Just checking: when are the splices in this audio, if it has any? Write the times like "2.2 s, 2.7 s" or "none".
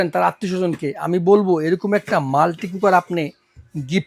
none